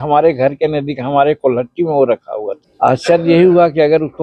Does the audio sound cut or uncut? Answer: cut